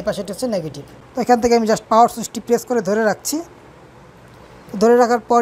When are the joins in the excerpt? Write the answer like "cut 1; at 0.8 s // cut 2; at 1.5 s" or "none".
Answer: cut 1; at 1.0 s